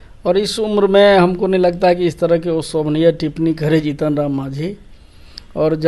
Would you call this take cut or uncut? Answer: uncut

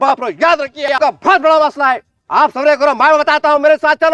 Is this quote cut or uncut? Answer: cut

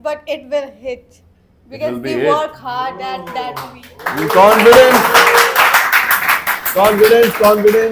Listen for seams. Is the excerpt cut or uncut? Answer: uncut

